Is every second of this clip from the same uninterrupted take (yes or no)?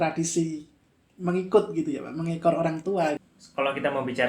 no